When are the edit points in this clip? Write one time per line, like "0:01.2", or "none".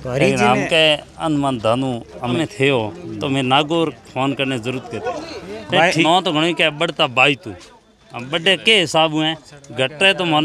0:02.4
0:06.0